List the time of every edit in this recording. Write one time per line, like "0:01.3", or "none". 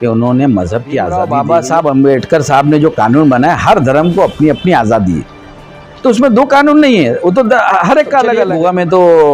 0:01.2
0:08.4